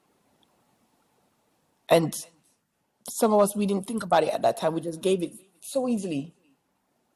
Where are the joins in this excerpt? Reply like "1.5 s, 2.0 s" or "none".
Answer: none